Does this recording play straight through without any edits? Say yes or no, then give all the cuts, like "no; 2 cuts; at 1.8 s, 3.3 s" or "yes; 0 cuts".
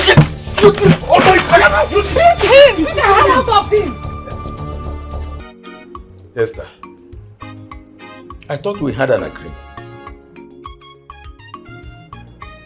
no; 1 cut; at 5.4 s